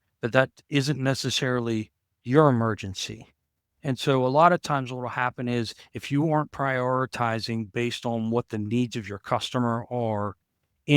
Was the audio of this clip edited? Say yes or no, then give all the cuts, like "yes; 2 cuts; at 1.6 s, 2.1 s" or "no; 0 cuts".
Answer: no; 0 cuts